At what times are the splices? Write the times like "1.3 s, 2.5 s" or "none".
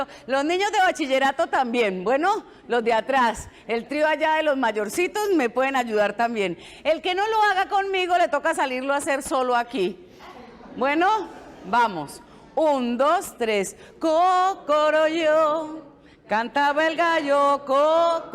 3.5 s, 14.6 s